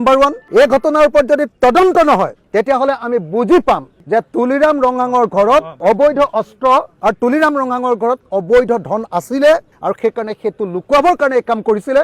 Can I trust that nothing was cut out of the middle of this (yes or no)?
yes